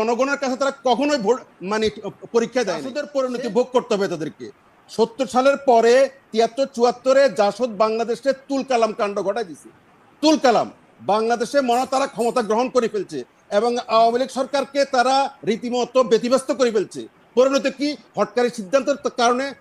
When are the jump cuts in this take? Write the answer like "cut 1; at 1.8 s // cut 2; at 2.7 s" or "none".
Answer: cut 1; at 3.1 s

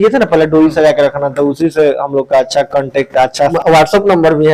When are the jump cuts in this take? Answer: cut 1; at 3.5 s

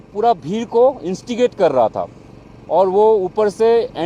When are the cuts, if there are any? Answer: none

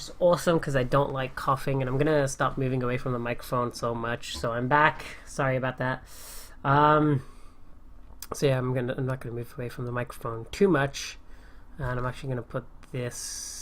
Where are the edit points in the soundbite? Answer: cut 1; at 10.6 s

